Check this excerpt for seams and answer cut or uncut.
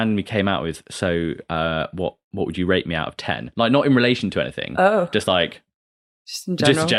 uncut